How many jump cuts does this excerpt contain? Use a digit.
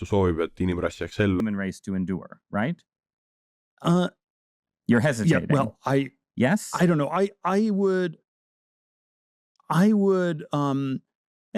0